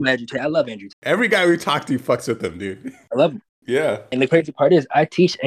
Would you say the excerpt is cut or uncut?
cut